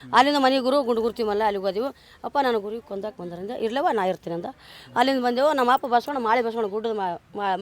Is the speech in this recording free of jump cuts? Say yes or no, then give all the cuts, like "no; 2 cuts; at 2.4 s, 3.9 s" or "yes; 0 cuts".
yes; 0 cuts